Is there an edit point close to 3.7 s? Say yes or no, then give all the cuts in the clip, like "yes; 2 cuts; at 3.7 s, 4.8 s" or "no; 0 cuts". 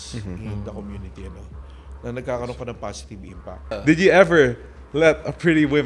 yes; 1 cut; at 3.7 s